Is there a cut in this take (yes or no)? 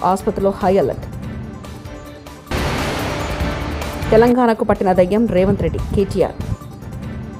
no